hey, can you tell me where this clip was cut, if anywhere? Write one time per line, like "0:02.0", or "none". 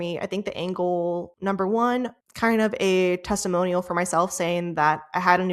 0:01.3
0:02.2